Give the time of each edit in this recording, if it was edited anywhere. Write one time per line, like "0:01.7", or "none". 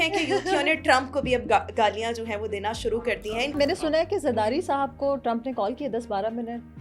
0:03.6

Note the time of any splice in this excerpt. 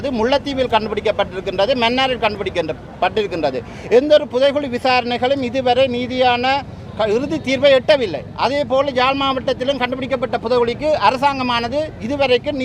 none

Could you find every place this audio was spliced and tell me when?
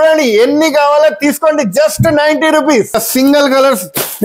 0:03.0

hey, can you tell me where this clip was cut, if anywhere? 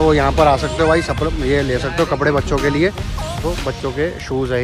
0:03.4

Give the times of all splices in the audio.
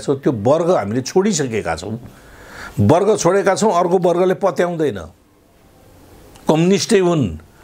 none

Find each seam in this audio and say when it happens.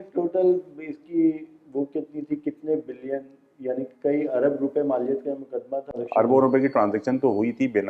0:05.9

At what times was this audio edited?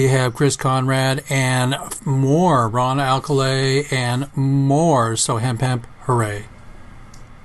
none

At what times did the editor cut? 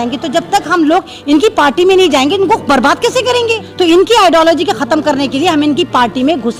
0:03.6

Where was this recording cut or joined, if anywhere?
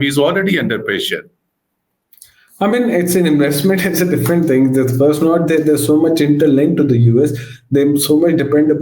none

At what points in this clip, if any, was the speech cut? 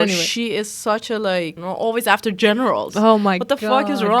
0:01.6

